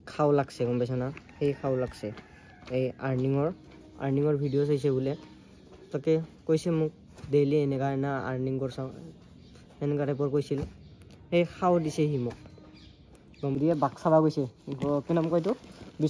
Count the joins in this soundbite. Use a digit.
1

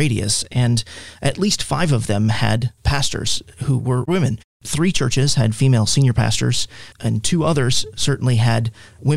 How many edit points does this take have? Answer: 0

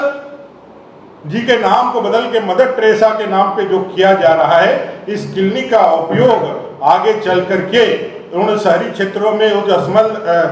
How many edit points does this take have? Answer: 0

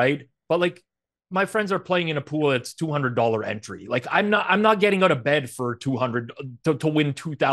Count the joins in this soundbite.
0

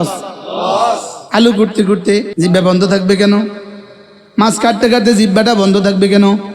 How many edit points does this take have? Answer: 2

